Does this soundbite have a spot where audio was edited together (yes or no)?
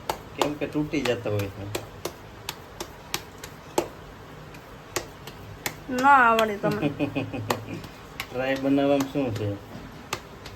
no